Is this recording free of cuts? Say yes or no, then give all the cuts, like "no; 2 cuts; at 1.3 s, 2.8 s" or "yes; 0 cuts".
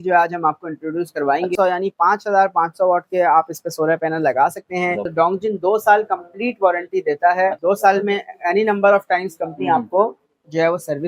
no; 3 cuts; at 1.5 s, 5.0 s, 7.6 s